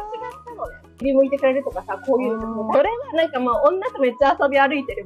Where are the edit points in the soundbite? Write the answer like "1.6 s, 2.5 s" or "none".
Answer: 1.0 s, 2.7 s